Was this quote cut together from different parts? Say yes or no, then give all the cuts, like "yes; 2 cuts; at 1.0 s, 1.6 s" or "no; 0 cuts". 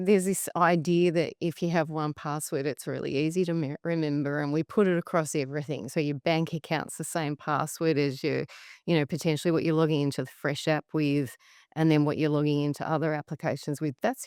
no; 0 cuts